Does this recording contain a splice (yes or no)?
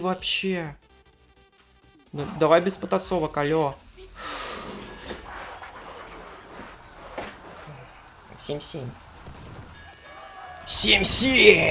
yes